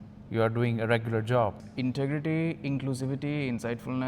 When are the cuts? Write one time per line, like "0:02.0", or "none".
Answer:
0:01.6